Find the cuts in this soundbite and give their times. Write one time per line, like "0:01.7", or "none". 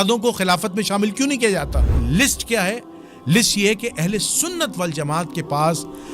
0:01.9